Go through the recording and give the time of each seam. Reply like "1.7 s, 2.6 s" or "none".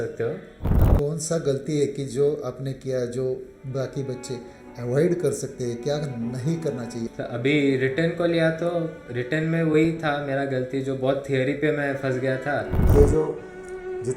0.8 s, 7.1 s, 12.9 s